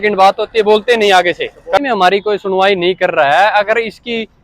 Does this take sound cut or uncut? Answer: cut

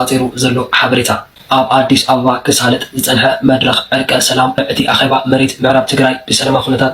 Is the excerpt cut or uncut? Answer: cut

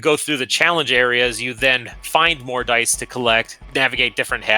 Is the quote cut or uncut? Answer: cut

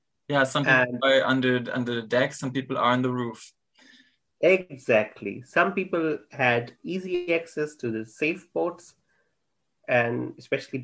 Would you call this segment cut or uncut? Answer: uncut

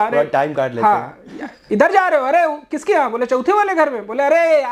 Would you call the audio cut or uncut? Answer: uncut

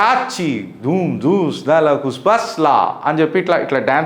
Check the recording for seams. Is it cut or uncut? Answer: uncut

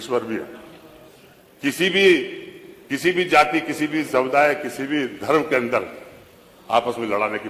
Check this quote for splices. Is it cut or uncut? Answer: uncut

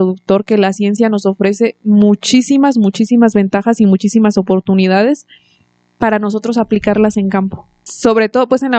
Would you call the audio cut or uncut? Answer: cut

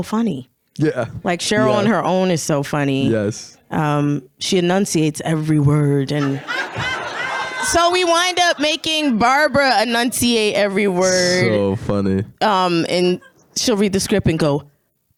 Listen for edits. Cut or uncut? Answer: uncut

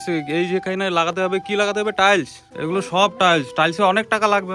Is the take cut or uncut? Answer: cut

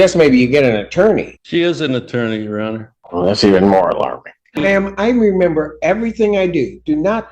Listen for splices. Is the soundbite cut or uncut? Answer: cut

